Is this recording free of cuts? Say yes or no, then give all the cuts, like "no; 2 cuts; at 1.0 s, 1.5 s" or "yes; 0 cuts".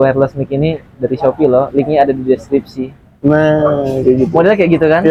yes; 0 cuts